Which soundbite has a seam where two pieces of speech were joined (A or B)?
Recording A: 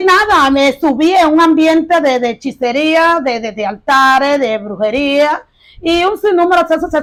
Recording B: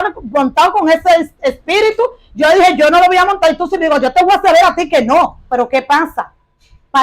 B